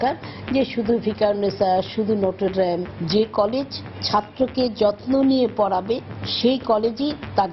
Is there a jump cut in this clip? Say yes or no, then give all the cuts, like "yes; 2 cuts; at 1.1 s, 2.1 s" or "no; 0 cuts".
no; 0 cuts